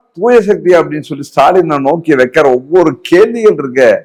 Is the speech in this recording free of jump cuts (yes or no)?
yes